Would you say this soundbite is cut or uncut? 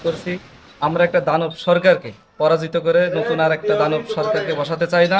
uncut